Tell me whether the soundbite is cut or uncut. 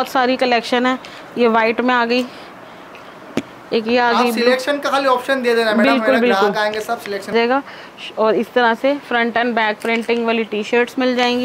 cut